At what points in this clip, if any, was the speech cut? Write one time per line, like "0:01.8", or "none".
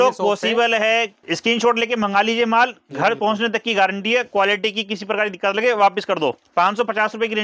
0:01.2
0:06.4